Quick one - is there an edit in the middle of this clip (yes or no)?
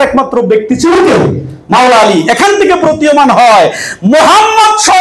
no